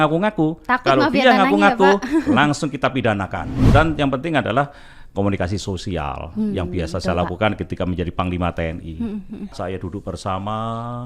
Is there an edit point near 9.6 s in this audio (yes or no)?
yes